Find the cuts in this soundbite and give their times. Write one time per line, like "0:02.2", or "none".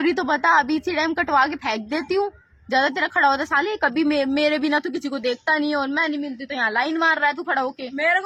none